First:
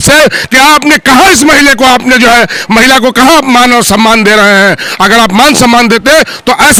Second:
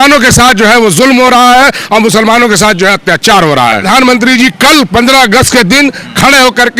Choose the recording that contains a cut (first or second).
second